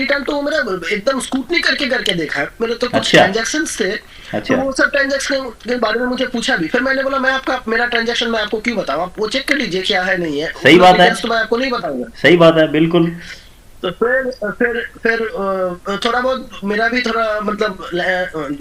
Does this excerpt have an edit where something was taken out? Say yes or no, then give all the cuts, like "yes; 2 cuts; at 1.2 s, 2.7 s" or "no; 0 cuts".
no; 0 cuts